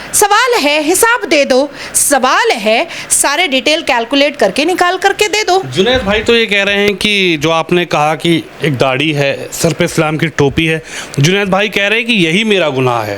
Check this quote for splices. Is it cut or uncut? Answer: uncut